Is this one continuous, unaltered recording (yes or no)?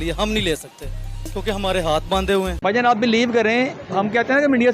no